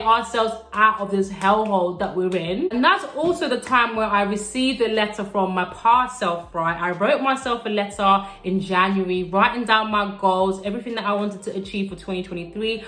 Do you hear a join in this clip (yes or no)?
no